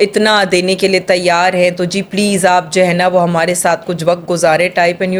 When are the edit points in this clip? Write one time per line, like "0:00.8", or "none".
none